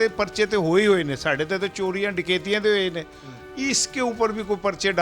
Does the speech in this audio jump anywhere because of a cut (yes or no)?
no